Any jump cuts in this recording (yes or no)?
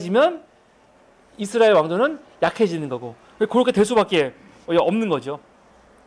no